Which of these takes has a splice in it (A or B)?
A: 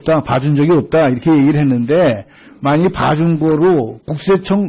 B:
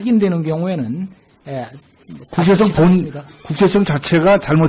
A